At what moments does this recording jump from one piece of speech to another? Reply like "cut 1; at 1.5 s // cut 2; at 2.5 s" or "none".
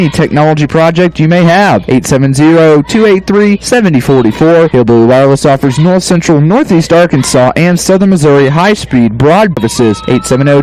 cut 1; at 9.6 s